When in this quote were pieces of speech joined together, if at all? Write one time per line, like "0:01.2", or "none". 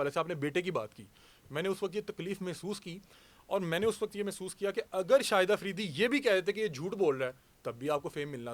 none

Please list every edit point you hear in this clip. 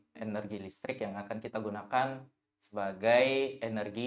none

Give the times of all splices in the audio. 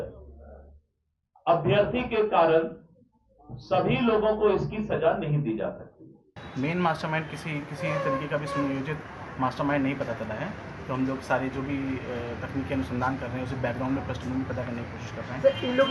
0:06.4

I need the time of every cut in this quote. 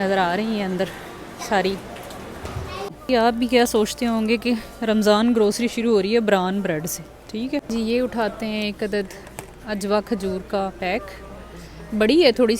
0:02.9
0:07.6

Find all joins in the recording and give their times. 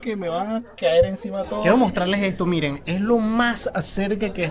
0:01.6

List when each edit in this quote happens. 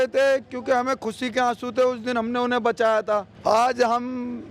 0:03.3

